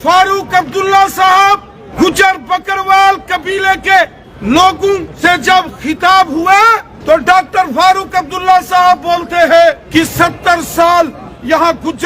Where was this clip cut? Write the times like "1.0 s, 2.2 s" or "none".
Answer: 1.8 s, 4.3 s, 5.1 s, 6.9 s, 9.8 s